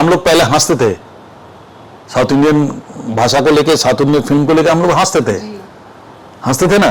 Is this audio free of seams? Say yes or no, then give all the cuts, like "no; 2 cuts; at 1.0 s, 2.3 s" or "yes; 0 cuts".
yes; 0 cuts